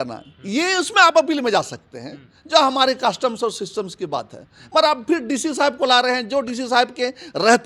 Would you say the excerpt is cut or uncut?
uncut